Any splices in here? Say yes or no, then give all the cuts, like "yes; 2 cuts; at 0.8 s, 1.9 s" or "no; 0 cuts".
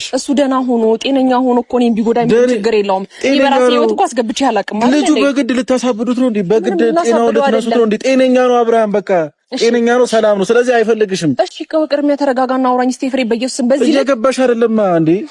no; 0 cuts